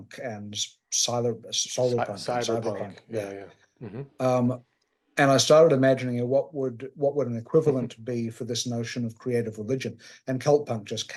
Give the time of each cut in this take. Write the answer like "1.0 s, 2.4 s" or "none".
none